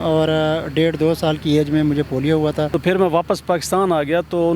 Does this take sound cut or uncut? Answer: cut